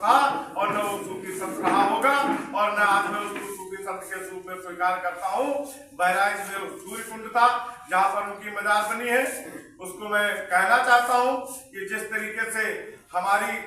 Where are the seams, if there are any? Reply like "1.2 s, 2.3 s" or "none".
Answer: none